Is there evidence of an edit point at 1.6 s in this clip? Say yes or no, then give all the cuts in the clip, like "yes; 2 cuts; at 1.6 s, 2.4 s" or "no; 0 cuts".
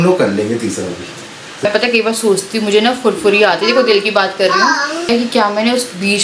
yes; 2 cuts; at 1.6 s, 5.1 s